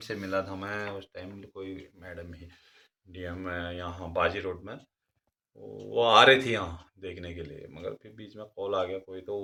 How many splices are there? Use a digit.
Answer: 0